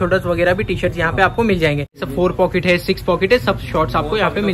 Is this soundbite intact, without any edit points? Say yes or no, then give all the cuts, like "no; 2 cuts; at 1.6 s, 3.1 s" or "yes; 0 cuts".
no; 1 cut; at 2.0 s